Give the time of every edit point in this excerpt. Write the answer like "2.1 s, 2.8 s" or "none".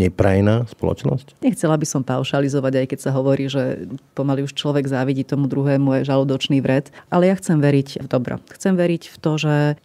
1.3 s, 7.0 s